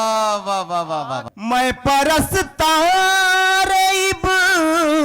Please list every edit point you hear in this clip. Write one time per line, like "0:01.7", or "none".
0:01.3